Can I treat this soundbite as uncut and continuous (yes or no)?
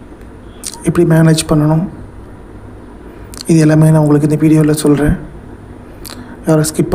yes